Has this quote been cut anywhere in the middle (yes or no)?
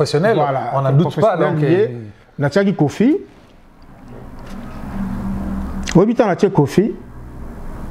no